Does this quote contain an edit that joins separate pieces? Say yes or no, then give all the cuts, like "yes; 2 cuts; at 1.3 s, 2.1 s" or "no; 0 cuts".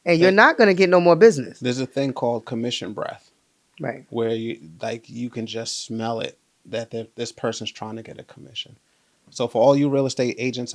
no; 0 cuts